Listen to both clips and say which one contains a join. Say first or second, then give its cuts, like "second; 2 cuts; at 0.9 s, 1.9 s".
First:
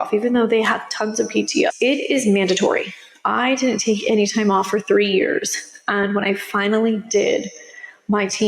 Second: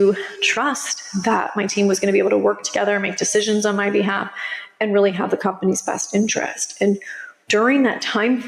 first; 1 cut; at 1.7 s